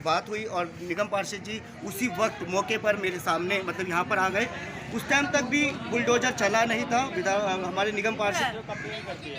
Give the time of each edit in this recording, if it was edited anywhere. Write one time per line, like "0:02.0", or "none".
0:08.4